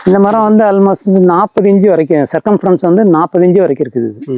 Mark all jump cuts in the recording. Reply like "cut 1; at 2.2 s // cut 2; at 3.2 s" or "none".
none